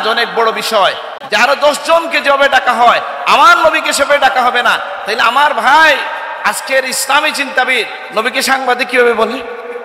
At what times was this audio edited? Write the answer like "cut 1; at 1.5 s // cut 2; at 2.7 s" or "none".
cut 1; at 1.1 s